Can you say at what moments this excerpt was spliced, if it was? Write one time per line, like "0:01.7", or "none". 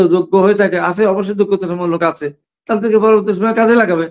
none